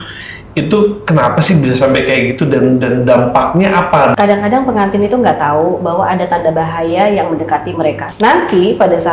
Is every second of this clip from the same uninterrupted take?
no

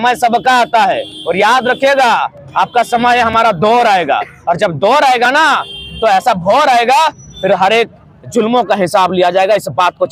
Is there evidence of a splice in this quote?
no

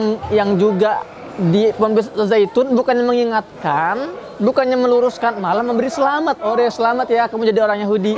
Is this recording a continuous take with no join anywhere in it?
yes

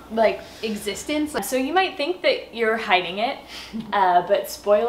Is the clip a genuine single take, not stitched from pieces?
no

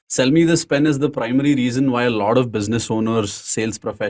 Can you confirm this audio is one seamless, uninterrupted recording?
yes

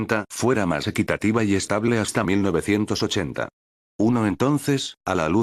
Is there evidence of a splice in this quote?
no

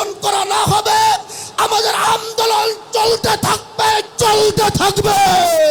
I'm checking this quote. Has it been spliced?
no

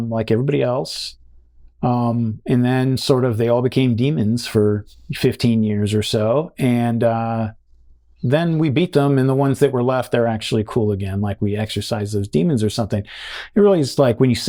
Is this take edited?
no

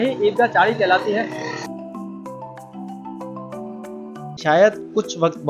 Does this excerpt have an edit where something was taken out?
yes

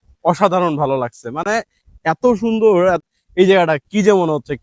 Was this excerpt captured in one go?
no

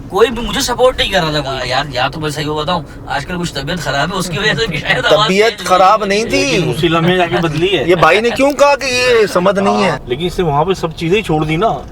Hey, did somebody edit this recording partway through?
yes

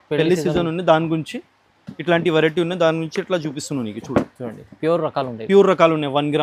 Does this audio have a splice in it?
no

